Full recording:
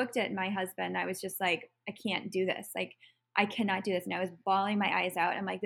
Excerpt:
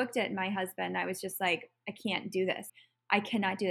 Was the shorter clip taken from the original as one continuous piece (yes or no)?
no